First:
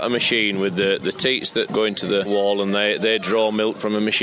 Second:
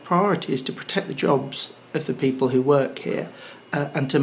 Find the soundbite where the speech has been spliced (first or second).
first